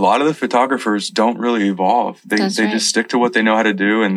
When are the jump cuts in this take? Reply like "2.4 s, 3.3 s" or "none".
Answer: none